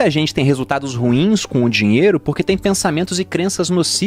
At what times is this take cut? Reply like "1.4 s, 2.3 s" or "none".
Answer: none